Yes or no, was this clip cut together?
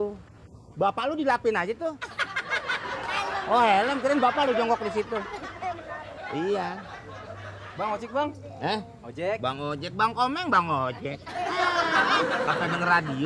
no